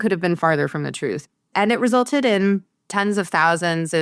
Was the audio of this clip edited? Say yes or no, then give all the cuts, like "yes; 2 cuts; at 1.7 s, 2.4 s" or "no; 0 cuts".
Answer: yes; 2 cuts; at 1.3 s, 2.8 s